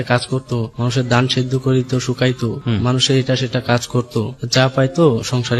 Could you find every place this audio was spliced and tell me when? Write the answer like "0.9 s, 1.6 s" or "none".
none